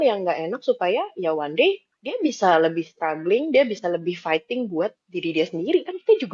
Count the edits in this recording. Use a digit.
0